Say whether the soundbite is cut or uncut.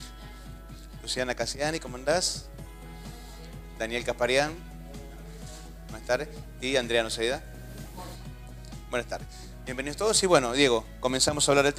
uncut